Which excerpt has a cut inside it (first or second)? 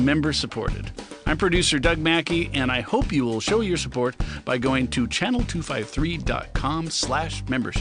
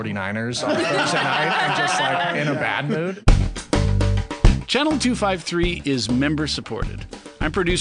second